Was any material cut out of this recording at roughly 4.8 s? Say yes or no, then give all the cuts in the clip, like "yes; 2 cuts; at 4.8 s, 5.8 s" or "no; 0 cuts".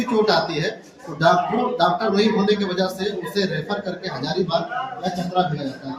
no; 0 cuts